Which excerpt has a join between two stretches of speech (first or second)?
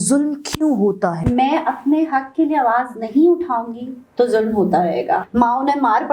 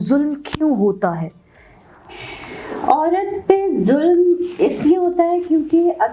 first